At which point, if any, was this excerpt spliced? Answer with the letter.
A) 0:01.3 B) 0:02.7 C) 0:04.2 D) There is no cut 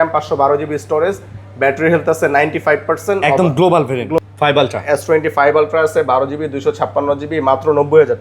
C